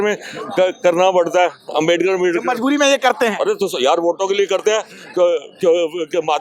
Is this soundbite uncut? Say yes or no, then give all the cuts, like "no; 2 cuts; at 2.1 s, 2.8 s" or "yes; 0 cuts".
yes; 0 cuts